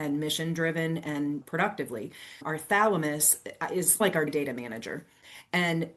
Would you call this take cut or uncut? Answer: uncut